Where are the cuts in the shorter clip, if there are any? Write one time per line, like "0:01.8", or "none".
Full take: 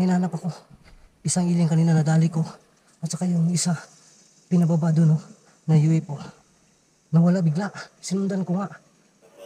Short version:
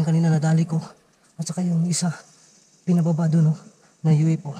none